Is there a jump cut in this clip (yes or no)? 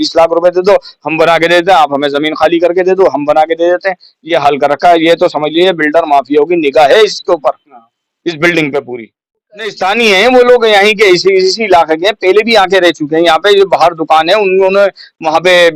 yes